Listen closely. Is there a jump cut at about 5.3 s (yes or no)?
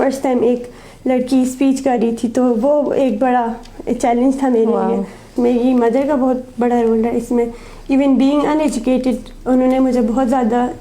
yes